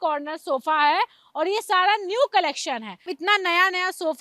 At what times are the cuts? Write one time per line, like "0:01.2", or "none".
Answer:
none